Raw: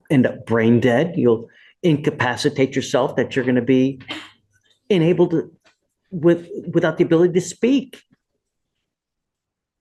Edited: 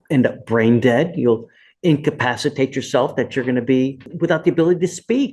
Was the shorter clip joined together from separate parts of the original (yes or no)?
yes